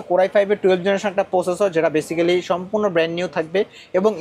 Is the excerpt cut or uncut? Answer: uncut